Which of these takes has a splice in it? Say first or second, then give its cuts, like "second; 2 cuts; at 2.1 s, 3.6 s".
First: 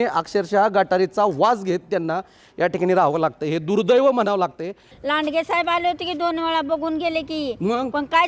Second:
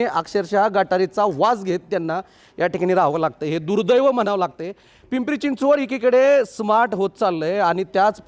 first; 1 cut; at 5.0 s